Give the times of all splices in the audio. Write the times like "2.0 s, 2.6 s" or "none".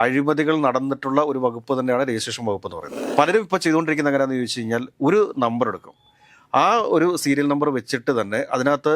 3.0 s